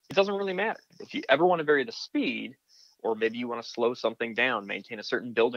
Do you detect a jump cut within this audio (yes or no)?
yes